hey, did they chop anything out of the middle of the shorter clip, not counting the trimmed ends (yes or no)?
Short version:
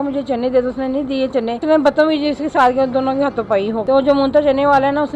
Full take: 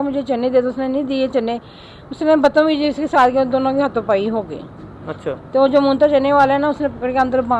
yes